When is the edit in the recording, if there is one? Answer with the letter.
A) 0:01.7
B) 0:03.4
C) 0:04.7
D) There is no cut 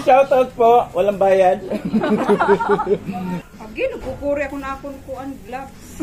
B